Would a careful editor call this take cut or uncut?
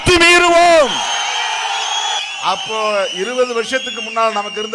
cut